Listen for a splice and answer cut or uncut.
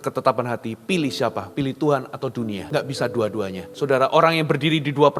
cut